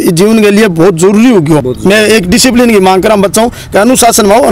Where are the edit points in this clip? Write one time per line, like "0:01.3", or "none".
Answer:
0:01.7